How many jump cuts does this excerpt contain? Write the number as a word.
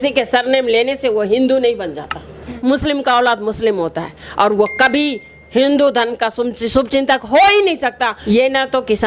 two